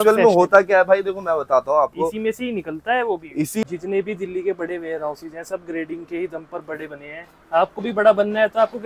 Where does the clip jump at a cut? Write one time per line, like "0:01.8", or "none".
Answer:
0:03.6